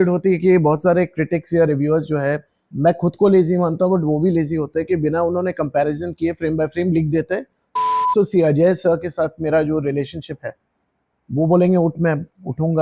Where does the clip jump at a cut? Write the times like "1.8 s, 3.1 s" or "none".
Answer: 2.7 s, 7.9 s